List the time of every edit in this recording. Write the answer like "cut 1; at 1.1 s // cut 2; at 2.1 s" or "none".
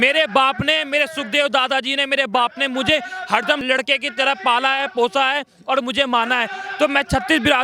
cut 1; at 3.6 s